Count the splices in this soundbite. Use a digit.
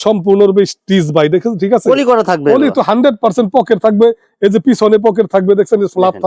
0